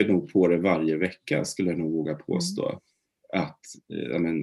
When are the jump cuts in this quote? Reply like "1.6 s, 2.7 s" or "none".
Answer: none